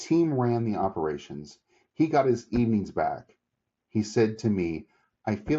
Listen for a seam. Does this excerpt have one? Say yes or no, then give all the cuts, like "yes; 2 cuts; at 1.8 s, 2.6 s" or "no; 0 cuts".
no; 0 cuts